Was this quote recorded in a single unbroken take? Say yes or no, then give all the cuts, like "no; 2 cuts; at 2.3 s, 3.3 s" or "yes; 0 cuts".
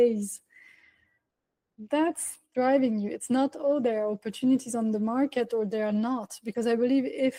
yes; 0 cuts